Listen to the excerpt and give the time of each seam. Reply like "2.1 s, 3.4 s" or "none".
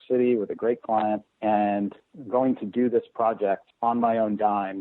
1.3 s, 3.7 s

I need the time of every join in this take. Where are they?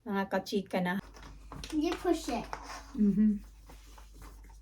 1.0 s

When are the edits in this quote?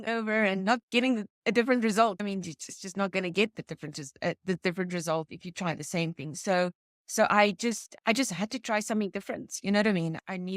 none

